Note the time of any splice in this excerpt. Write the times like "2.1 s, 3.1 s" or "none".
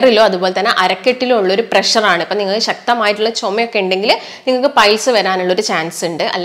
none